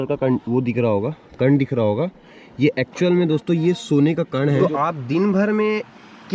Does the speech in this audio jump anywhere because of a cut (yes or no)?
yes